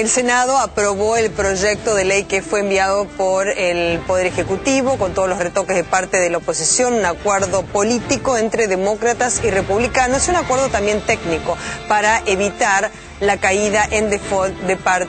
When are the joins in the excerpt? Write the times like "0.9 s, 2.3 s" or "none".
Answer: none